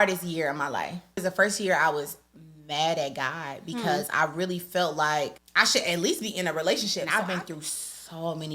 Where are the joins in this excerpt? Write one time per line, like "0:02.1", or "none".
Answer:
0:01.2
0:05.4
0:07.0